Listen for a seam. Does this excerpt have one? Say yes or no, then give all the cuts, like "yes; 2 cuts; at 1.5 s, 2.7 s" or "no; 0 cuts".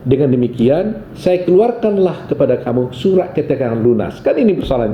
no; 0 cuts